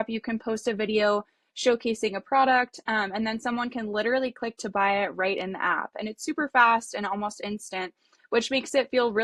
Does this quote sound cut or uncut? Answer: uncut